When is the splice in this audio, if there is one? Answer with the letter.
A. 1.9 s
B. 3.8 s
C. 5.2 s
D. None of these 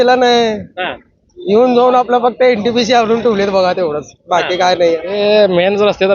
C